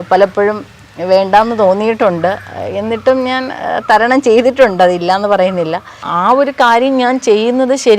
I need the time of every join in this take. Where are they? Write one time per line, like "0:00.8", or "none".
0:06.0